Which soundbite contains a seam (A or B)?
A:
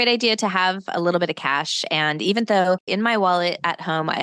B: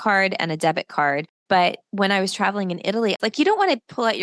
B